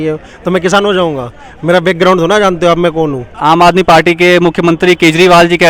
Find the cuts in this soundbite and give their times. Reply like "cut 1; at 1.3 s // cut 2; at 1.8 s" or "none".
cut 1; at 3.3 s